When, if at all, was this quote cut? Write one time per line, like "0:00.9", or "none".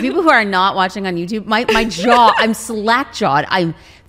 none